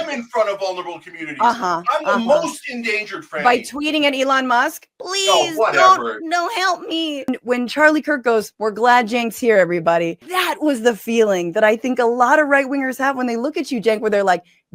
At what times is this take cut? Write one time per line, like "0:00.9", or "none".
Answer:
0:07.3
0:08.5
0:10.2